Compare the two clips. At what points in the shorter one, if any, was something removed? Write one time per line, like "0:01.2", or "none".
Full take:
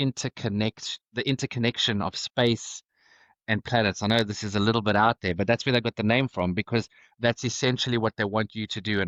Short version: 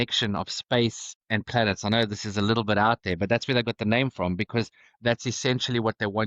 0:01.1